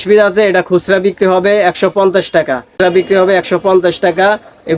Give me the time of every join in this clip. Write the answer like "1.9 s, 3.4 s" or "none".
2.7 s